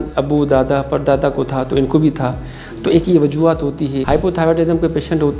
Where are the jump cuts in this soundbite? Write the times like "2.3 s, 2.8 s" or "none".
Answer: 4.0 s